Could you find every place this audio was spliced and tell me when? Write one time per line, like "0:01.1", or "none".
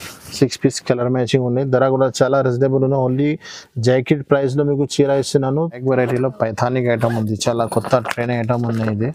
0:05.8

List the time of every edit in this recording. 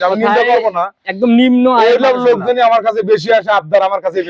none

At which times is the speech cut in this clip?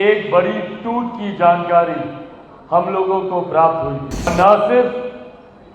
0:04.3

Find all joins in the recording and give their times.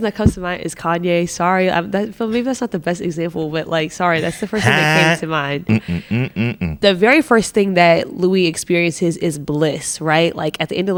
none

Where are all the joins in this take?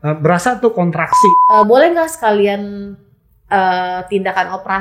0:01.4

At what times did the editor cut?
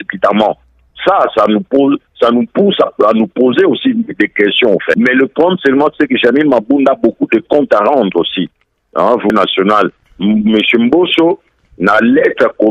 0:05.0
0:09.3

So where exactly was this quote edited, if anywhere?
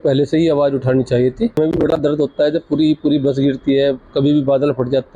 0:01.6

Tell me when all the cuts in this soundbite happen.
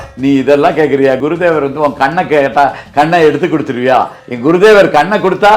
0:01.2
0:04.2

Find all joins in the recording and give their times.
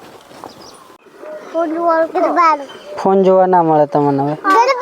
0:01.1

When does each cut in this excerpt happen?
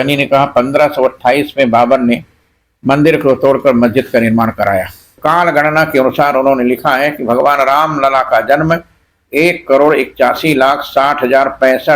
0:05.2

